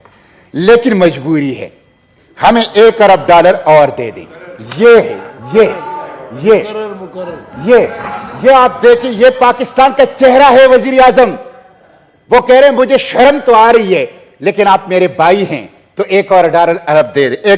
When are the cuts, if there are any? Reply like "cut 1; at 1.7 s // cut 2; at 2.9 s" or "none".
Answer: none

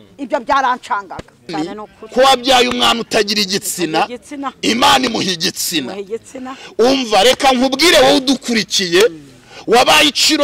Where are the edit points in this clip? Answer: cut 1; at 1.5 s

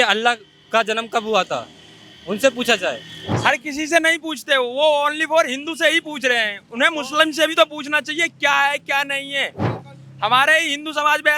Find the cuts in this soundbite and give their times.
cut 1; at 3.2 s

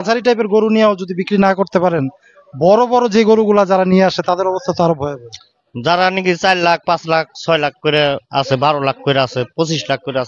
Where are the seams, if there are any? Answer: none

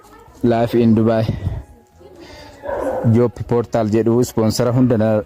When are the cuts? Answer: none

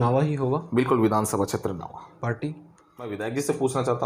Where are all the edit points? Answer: cut 1; at 3.1 s

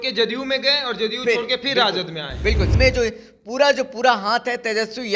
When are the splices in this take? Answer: cut 1; at 2.7 s

